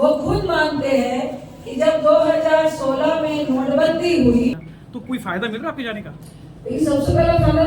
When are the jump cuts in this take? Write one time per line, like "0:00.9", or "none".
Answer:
0:04.5